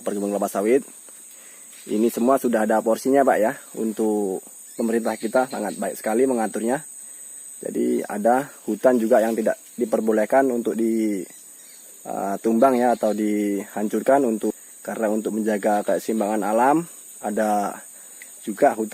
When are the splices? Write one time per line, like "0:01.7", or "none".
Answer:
0:14.5